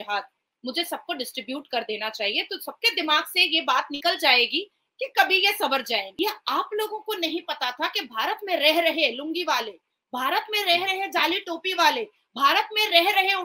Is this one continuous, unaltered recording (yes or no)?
no